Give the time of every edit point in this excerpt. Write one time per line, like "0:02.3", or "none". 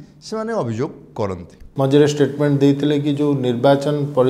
0:01.6

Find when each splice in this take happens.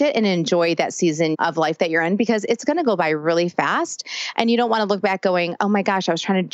0:01.3

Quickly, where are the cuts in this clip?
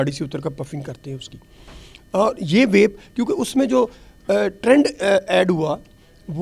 none

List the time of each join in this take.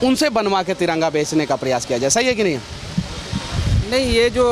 none

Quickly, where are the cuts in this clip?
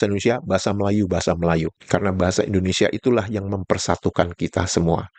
none

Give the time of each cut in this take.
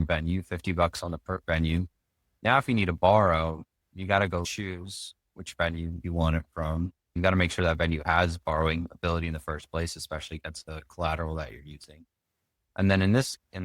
0:04.4
0:07.1
0:10.6

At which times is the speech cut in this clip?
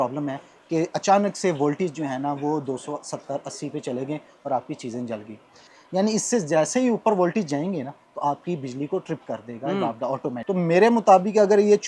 0:05.7
0:10.4

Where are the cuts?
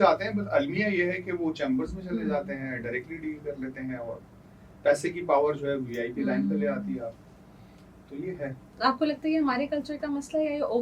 none

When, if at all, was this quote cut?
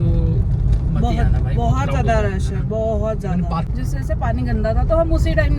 0:03.7

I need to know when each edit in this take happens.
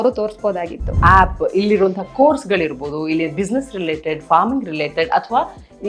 0:01.0

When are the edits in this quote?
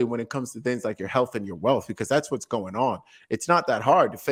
none

